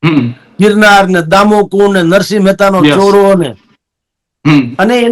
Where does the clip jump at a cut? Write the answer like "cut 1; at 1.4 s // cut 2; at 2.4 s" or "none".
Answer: none

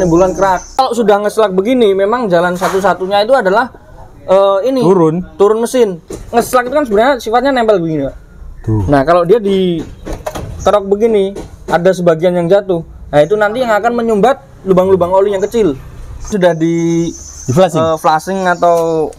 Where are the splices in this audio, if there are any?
cut 1; at 0.7 s // cut 2; at 6.0 s // cut 3; at 16.3 s

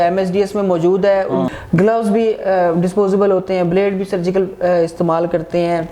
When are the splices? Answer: cut 1; at 1.5 s

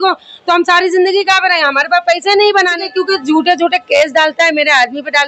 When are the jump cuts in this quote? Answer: cut 1; at 2.8 s

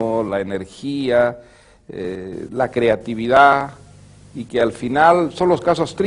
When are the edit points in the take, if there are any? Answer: cut 1; at 4.5 s

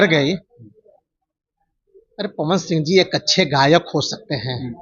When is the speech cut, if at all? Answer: none

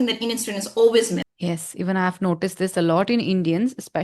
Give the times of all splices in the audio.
cut 1; at 1.3 s

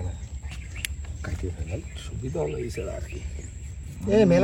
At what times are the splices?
none

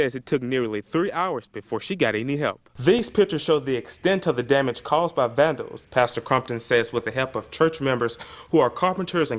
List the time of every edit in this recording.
cut 1; at 2.7 s

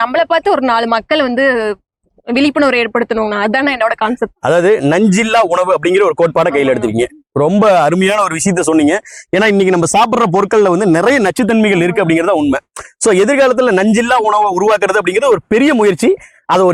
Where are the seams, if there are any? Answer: none

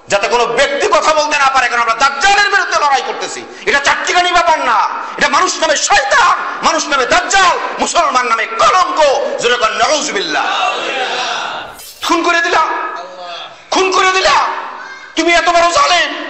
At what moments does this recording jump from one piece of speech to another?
cut 1; at 11.7 s

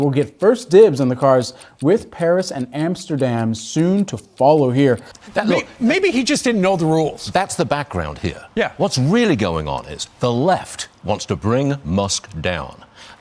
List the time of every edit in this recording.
cut 1; at 5.1 s

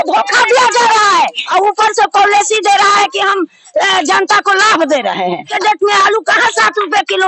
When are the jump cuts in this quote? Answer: cut 1; at 1.4 s // cut 2; at 5.5 s

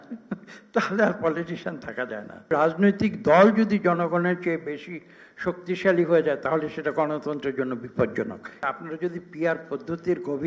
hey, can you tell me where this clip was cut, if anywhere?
cut 1; at 2.5 s // cut 2; at 8.6 s

